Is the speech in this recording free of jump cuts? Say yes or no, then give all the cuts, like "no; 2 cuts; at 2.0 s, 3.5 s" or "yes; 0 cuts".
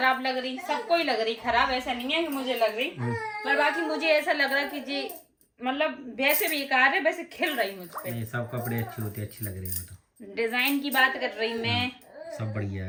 yes; 0 cuts